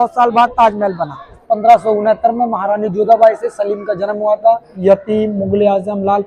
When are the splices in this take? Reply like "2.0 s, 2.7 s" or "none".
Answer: 1.4 s, 4.7 s